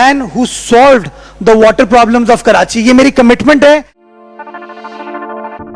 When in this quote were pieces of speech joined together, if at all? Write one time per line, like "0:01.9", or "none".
0:04.0